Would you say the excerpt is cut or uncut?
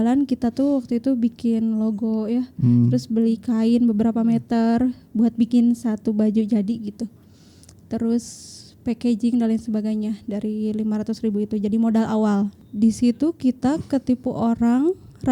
cut